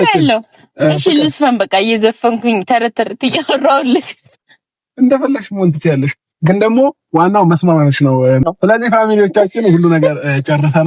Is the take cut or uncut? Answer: cut